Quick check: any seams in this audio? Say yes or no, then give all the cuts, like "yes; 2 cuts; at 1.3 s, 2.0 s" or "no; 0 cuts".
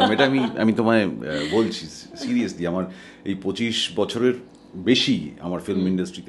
no; 0 cuts